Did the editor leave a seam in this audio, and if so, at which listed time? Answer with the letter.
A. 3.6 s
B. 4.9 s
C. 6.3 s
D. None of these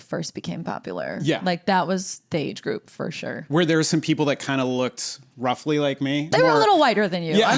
C